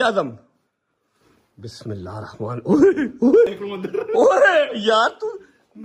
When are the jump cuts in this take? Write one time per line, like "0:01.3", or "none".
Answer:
0:03.5